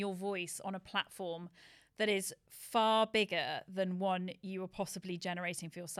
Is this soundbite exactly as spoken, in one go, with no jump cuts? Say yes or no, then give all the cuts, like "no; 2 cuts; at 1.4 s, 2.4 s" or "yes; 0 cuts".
yes; 0 cuts